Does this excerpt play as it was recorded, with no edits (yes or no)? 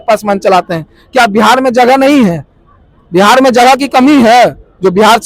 yes